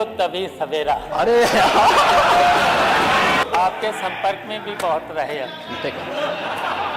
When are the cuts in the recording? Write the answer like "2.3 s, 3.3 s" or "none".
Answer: 3.4 s